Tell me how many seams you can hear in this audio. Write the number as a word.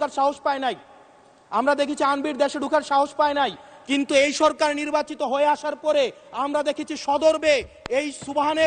zero